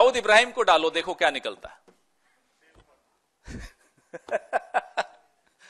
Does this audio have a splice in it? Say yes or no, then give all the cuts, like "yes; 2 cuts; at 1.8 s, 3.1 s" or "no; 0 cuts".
no; 0 cuts